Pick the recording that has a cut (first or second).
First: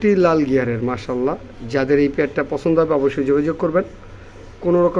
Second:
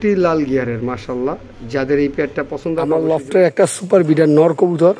second